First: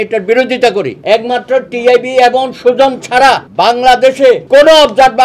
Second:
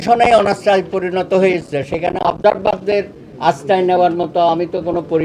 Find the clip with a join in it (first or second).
first